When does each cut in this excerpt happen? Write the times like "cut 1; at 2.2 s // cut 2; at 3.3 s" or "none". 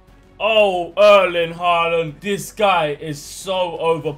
cut 1; at 2.2 s